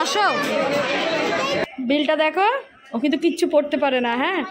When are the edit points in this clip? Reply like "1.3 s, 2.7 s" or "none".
1.6 s